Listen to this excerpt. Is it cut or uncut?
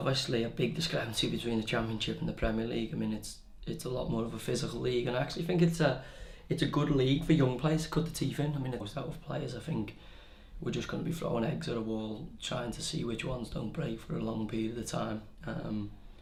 uncut